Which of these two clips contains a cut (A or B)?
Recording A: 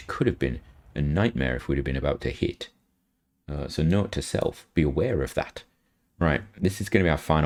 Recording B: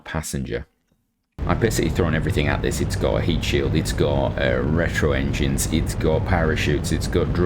B